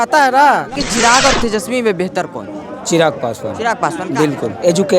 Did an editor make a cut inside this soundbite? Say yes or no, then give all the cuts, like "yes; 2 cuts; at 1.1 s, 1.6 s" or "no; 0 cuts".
yes; 1 cut; at 0.9 s